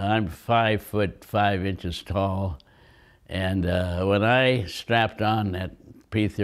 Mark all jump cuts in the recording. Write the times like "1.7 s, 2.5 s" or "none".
none

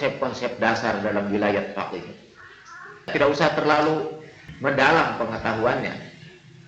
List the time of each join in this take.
3.1 s

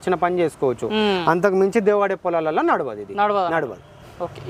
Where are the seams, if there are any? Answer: none

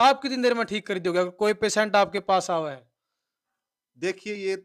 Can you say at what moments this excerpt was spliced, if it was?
none

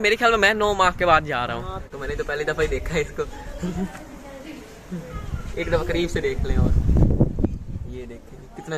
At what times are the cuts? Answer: 1.9 s

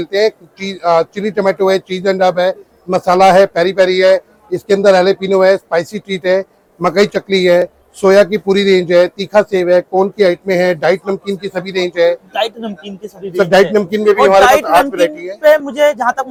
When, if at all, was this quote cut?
none

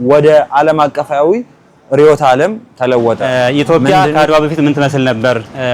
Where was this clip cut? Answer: 3.6 s

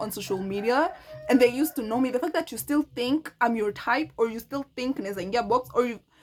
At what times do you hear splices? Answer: none

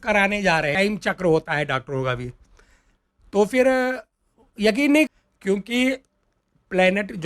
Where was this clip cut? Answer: 0.7 s, 5.1 s

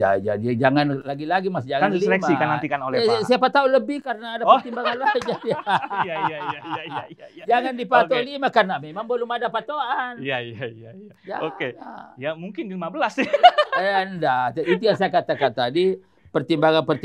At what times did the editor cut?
none

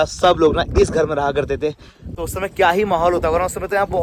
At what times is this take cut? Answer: none

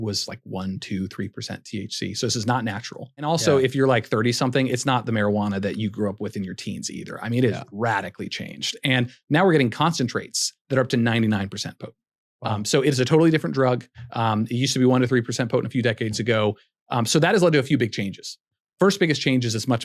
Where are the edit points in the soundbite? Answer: 3.3 s

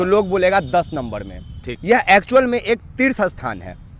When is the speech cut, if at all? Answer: 1.7 s

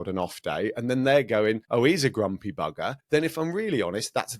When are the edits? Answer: 1.6 s, 2.9 s

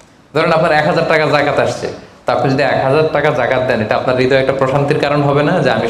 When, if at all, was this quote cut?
none

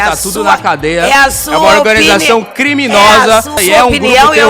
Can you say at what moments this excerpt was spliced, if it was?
3.5 s

